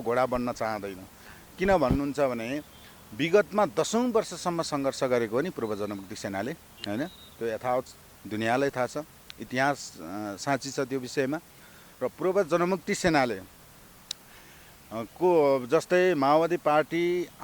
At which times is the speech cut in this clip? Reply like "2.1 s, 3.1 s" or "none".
none